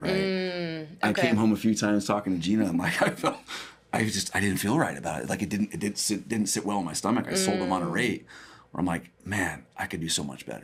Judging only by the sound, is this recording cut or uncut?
uncut